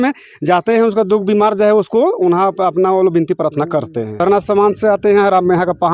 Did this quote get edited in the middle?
yes; 1 cut; at 4.2 s

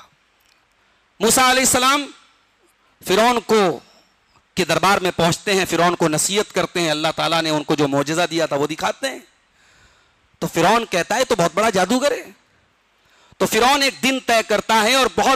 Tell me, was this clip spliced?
no; 0 cuts

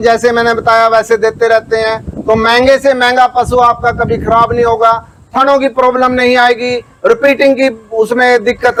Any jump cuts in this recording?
no; 0 cuts

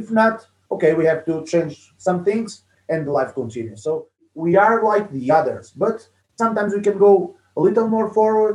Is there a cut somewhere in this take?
yes; 1 cut; at 4.2 s

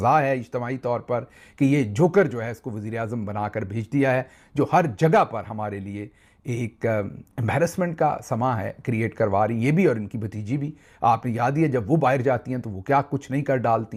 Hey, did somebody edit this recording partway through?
no; 0 cuts

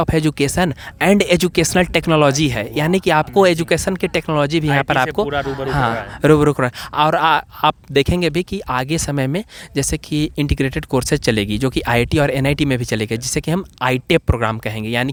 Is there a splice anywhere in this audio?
no; 0 cuts

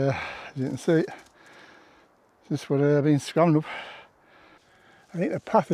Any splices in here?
no; 0 cuts

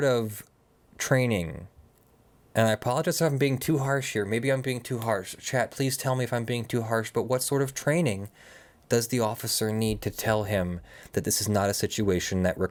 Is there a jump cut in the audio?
no; 0 cuts

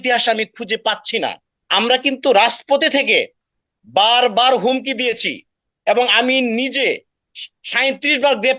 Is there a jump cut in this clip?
yes; 1 cut; at 1.5 s

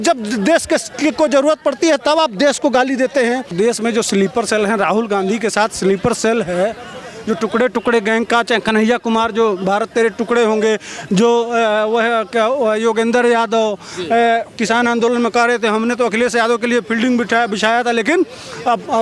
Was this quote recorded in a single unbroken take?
no; 1 cut; at 3.5 s

